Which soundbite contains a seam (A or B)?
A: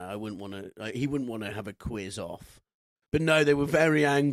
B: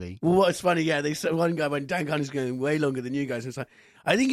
A